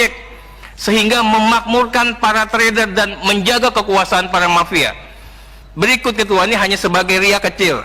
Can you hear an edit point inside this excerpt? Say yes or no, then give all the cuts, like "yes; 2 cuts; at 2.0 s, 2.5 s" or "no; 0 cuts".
no; 0 cuts